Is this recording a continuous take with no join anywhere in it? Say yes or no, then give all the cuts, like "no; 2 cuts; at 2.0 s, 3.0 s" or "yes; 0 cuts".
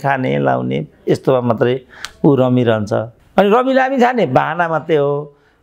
no; 1 cut; at 3.2 s